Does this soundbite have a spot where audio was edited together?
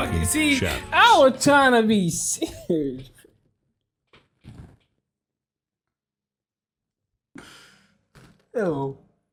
no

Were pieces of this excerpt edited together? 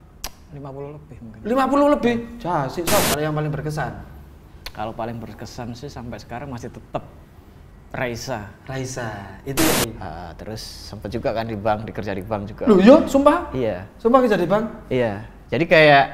yes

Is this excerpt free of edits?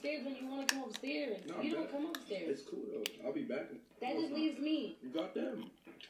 no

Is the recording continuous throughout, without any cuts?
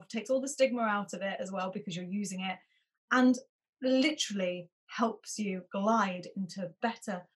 yes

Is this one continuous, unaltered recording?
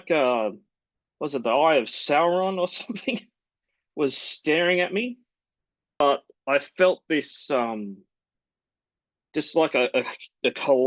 no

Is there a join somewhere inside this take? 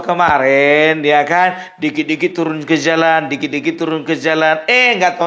no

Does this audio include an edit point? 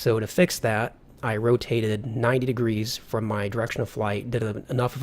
yes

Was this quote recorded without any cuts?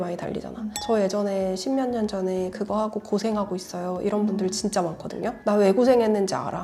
yes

